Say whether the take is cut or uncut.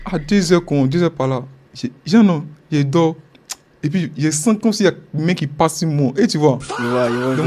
uncut